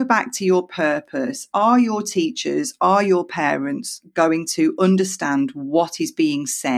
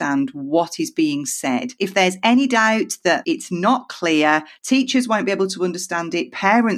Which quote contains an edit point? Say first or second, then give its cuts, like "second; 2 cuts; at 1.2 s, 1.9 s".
second; 2 cuts; at 3.2 s, 4.5 s